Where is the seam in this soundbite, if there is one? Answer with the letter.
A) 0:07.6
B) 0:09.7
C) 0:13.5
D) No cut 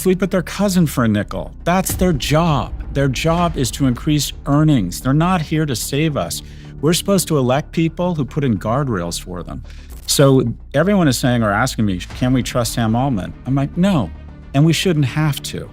D